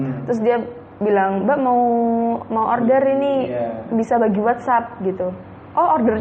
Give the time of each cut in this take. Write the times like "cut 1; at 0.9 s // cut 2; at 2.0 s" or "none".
none